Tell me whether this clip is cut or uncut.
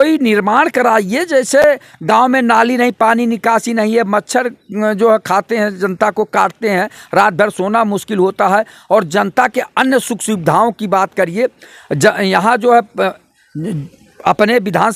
uncut